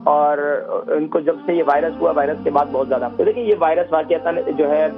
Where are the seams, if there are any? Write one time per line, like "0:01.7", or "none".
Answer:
0:03.1